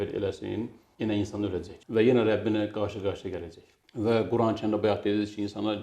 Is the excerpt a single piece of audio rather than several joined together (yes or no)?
yes